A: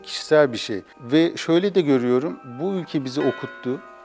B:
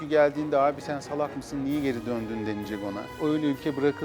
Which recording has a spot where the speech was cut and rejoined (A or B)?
B